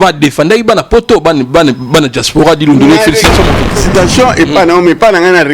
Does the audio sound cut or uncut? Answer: cut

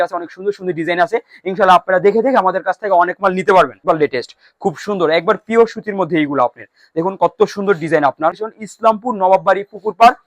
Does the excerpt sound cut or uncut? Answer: cut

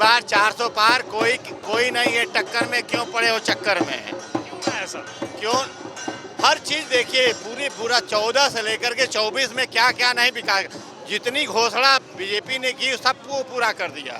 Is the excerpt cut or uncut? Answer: uncut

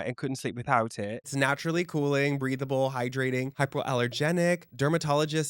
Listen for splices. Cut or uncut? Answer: cut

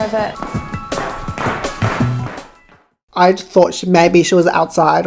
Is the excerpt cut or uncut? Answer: cut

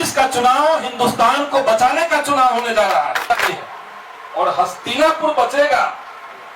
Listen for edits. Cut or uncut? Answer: cut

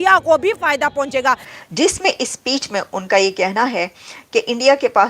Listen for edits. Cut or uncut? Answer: cut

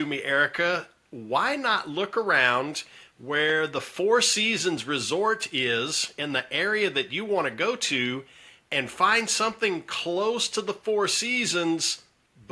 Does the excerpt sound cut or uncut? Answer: uncut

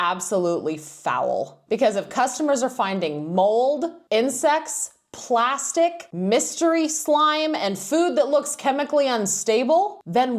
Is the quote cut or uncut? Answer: uncut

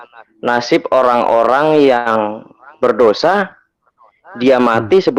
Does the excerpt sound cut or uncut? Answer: uncut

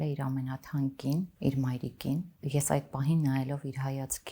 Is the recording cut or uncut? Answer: cut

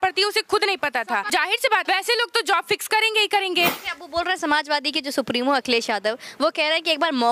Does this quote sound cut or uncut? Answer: cut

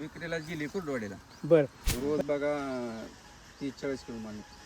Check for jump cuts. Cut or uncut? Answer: cut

